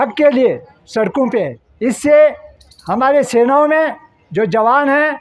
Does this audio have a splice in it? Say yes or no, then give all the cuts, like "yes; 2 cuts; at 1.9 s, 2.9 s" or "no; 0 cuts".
yes; 1 cut; at 1.6 s